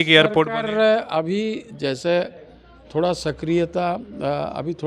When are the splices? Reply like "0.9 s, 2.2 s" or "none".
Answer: none